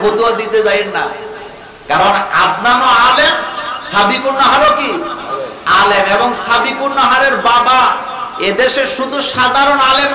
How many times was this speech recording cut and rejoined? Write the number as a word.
zero